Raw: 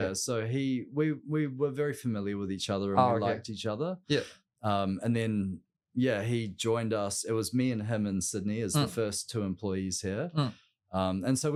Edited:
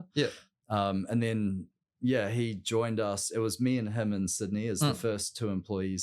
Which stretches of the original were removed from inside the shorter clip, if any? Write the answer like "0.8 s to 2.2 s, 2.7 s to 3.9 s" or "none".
none